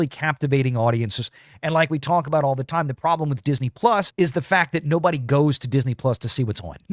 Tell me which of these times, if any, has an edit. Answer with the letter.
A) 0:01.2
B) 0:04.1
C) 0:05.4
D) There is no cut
B